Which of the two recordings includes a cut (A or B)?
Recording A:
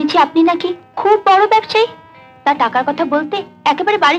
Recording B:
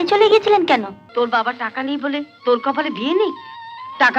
B